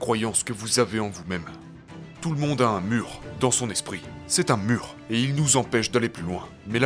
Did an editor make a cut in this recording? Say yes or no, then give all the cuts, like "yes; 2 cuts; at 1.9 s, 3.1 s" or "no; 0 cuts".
yes; 1 cut; at 2.1 s